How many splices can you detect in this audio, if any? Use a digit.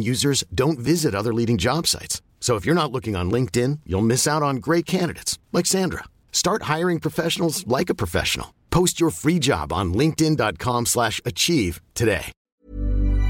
1